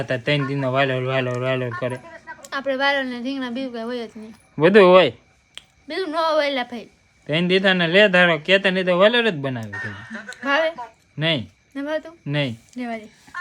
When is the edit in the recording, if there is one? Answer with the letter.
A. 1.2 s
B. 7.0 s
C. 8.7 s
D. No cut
D